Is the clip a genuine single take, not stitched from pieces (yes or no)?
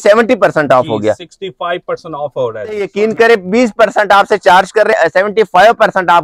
no